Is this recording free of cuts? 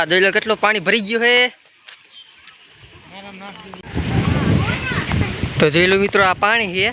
no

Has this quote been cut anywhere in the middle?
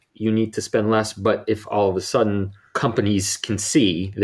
yes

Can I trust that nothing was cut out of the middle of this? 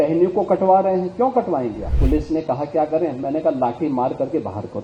no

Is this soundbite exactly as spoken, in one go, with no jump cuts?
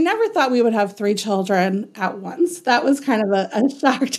yes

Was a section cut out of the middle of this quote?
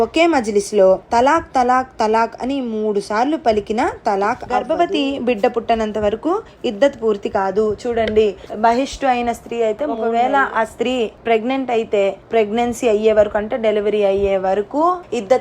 yes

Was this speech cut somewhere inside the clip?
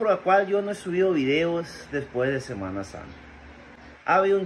no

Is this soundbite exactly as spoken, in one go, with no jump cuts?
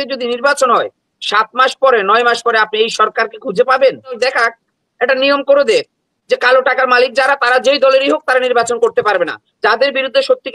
no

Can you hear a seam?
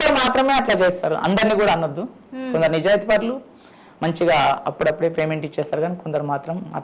no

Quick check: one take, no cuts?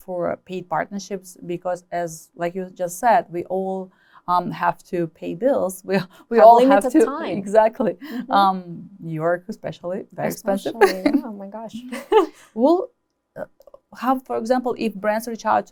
yes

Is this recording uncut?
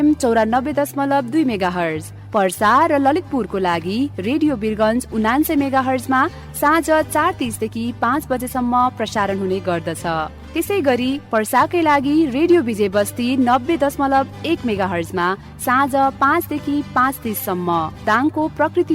yes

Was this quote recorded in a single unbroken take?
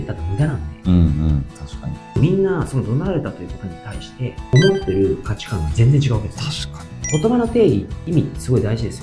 no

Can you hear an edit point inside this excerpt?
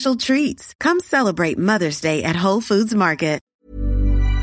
yes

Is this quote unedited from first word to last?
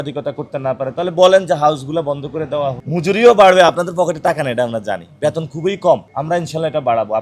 no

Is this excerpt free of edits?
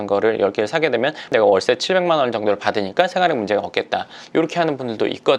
yes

